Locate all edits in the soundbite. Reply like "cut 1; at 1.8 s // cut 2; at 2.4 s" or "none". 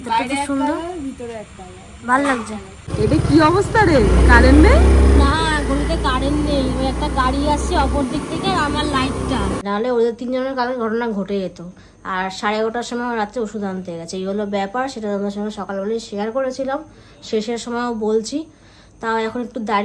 cut 1; at 2.9 s // cut 2; at 9.6 s